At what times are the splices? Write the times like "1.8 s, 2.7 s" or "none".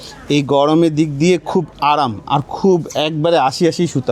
none

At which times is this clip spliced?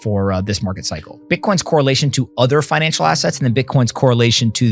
1.2 s

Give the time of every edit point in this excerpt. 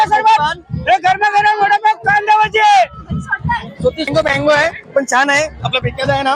4.1 s

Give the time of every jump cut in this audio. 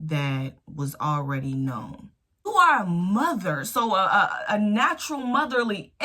2.5 s

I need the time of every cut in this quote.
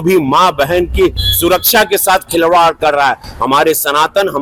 none

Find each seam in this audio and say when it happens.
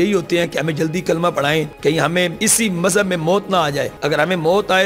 1.7 s, 2.4 s, 3.9 s

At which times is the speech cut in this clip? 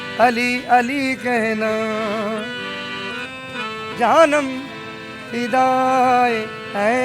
3.9 s

